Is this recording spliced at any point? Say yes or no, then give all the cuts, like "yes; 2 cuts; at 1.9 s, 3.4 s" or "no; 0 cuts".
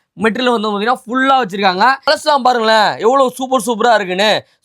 yes; 1 cut; at 2.1 s